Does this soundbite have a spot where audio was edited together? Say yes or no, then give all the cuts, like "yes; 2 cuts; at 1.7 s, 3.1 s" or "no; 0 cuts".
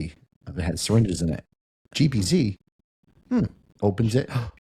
no; 0 cuts